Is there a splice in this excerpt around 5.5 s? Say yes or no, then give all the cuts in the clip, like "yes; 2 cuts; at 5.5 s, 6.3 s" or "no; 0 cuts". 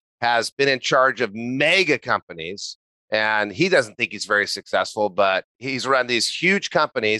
yes; 1 cut; at 5.5 s